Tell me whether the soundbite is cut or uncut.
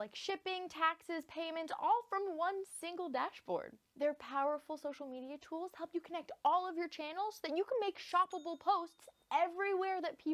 cut